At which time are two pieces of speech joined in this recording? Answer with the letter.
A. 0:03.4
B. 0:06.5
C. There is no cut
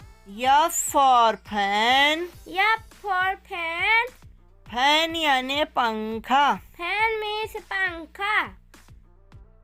C